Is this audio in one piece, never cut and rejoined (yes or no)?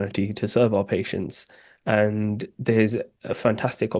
yes